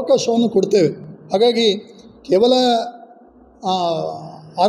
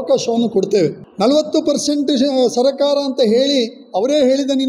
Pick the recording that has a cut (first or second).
second